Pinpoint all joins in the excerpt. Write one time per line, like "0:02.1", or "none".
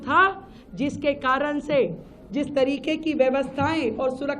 none